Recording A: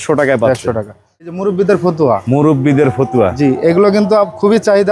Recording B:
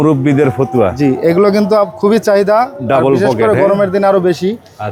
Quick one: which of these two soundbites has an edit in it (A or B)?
A